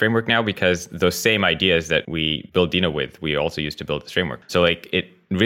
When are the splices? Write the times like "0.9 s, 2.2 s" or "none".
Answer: 2.3 s, 4.4 s